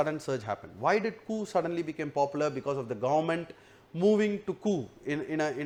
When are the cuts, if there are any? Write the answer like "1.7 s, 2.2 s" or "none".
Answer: none